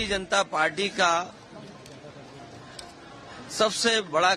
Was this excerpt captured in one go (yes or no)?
yes